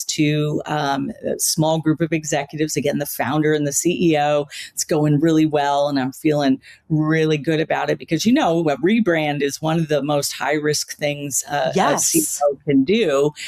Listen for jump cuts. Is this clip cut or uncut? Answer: uncut